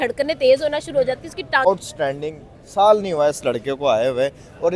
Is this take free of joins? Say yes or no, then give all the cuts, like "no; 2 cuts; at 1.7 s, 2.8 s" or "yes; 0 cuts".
no; 1 cut; at 1.7 s